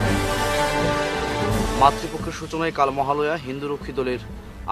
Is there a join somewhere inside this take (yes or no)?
yes